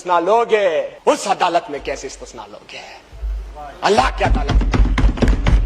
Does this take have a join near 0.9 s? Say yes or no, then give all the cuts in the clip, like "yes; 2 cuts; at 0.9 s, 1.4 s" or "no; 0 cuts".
yes; 1 cut; at 0.9 s